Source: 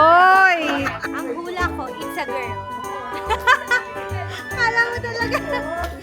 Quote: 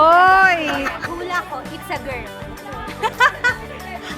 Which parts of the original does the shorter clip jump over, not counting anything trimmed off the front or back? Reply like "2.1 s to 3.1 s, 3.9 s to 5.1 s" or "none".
1.0 s to 1.3 s